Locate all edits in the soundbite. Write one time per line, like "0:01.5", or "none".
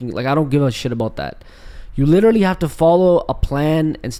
none